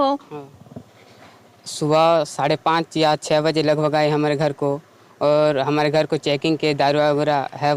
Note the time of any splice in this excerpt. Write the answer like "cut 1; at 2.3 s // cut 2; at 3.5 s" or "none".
none